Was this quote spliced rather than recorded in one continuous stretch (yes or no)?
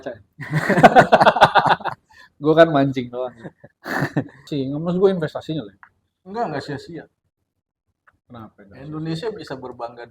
yes